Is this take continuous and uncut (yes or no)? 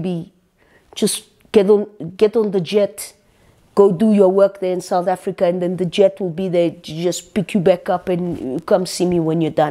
yes